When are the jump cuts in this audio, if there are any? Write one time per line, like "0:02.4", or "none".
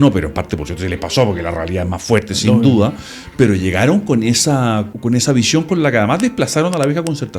0:04.9